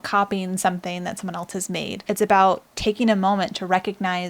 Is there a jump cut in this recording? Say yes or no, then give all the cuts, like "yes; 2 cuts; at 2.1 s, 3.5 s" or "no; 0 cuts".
yes; 1 cut; at 2.0 s